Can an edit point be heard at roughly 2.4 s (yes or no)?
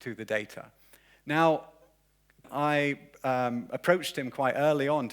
yes